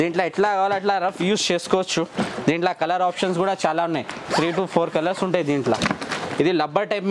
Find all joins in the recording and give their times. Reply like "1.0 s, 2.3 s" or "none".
none

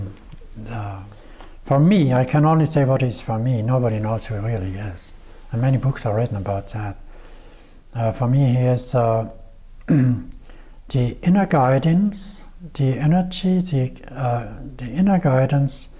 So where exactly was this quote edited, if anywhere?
1.1 s

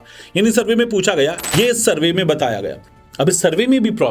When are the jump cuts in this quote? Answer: 1.4 s

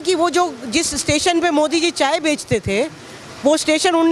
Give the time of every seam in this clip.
none

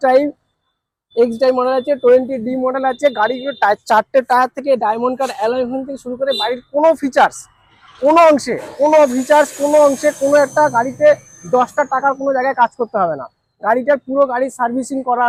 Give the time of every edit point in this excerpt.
none

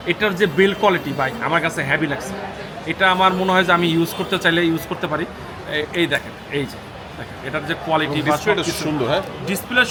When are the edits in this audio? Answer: none

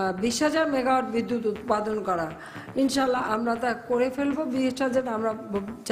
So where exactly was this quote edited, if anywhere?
none

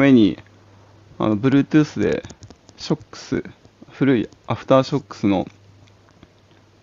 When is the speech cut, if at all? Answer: none

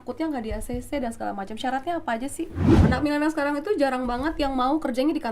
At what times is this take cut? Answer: 2.8 s

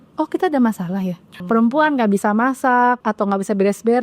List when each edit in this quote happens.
1.3 s, 3.0 s

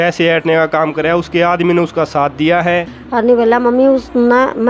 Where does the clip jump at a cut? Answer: 3.0 s

